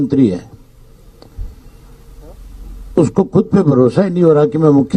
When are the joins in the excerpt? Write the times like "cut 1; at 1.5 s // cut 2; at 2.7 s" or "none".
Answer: none